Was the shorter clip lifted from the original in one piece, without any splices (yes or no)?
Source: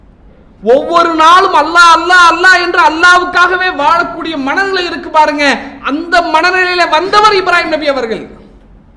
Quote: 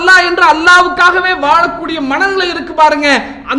yes